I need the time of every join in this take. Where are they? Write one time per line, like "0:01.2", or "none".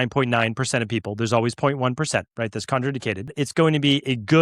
0:03.4